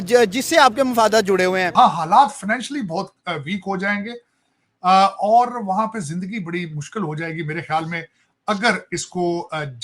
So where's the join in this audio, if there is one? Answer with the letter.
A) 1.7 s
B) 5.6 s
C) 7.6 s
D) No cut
A